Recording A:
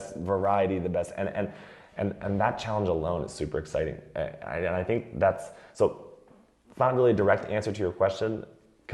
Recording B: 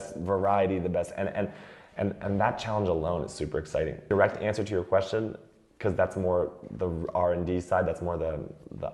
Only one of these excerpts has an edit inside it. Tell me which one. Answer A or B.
B